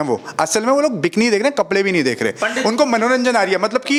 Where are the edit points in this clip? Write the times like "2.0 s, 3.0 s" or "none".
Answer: none